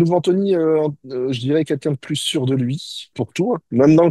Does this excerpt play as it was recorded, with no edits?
no; 1 cut; at 3.2 s

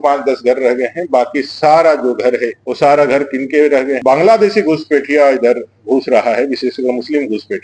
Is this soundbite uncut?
no; 2 cuts; at 2.6 s, 4.0 s

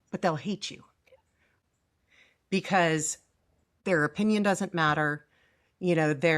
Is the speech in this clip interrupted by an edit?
yes; 2 cuts; at 1.5 s, 3.7 s

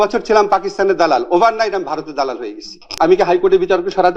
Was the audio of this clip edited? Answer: yes; 1 cut; at 2.9 s

